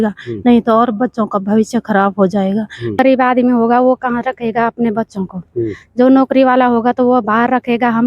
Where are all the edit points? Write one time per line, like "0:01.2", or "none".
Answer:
0:03.0